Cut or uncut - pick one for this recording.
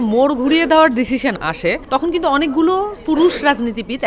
cut